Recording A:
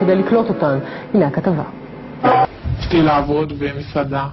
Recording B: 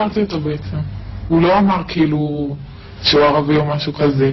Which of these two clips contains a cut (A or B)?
A